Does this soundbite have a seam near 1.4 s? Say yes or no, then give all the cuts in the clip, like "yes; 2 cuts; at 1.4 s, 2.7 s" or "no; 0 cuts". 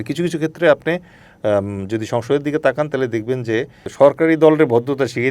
no; 1 cut; at 3.9 s